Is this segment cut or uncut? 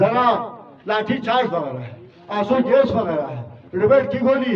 uncut